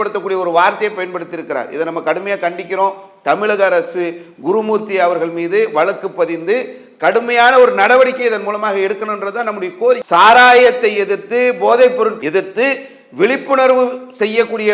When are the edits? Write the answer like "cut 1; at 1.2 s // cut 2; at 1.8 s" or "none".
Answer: cut 1; at 10.0 s